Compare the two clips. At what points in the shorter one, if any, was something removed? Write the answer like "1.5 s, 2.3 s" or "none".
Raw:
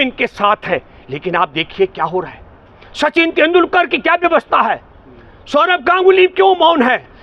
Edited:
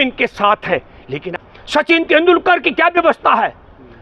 1.2 s